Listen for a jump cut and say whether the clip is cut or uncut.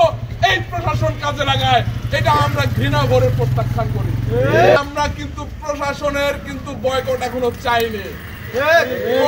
cut